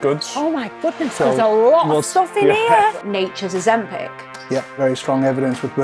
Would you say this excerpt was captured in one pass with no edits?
no; 2 cuts; at 3.0 s, 4.7 s

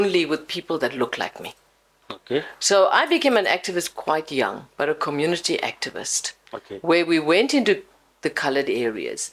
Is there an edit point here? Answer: no; 0 cuts

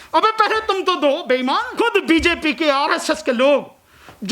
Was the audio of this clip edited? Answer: yes; 1 cut; at 1.7 s

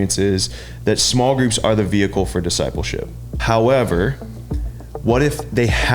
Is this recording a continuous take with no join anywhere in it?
no; 1 cut; at 3.3 s

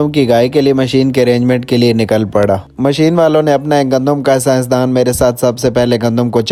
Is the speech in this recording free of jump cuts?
yes; 0 cuts

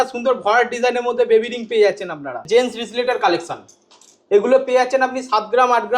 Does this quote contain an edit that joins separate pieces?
yes; 1 cut; at 2.4 s

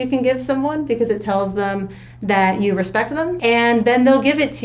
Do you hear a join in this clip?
yes; 1 cut; at 3.3 s

